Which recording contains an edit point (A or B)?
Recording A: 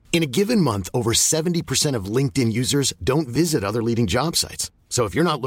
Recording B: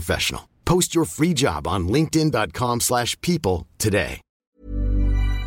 B